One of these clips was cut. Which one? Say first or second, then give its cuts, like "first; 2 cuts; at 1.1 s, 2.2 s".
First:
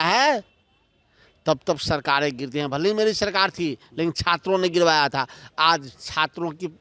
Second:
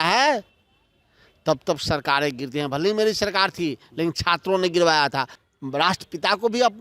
second; 1 cut; at 5.4 s